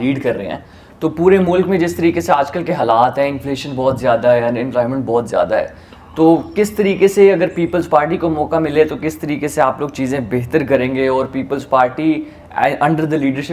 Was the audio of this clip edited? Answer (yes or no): no